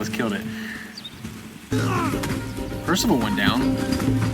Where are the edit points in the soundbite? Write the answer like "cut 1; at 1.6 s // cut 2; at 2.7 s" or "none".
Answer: cut 1; at 1.7 s